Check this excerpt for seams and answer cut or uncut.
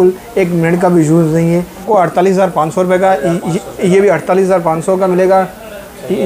cut